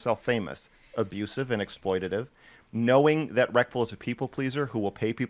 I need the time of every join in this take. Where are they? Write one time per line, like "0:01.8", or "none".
none